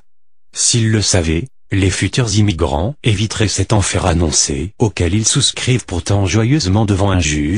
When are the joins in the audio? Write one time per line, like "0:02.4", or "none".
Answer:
0:06.3